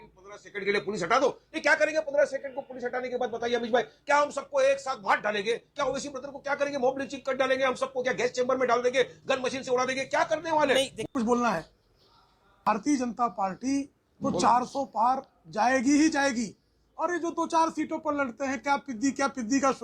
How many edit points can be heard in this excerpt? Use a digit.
1